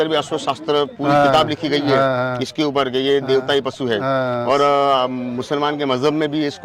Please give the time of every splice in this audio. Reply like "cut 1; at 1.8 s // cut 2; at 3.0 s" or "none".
none